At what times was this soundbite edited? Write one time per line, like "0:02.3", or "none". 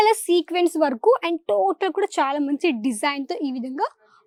none